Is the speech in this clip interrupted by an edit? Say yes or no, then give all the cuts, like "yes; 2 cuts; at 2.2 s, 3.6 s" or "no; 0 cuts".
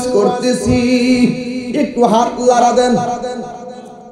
no; 0 cuts